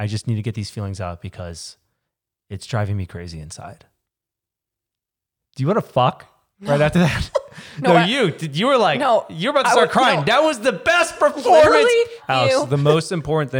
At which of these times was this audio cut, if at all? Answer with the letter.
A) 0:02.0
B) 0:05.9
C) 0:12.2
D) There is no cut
C